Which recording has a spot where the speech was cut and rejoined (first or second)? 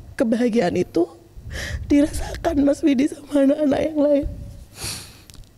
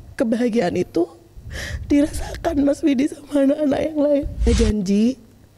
second